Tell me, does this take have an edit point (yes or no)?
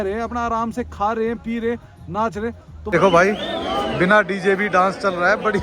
yes